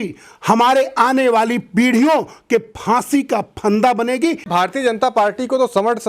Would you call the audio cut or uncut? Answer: cut